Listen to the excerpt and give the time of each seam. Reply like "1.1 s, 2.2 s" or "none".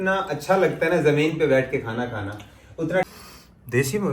3.0 s